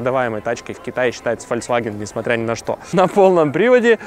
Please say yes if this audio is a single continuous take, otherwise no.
no